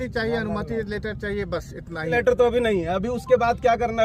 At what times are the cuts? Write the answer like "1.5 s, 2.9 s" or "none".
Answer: 2.1 s